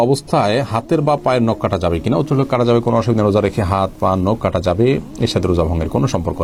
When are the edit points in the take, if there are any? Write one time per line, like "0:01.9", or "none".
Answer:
none